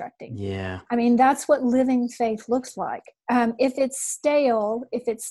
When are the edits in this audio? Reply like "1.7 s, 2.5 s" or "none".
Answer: 3.1 s